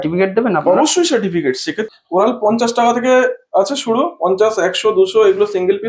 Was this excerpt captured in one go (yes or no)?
no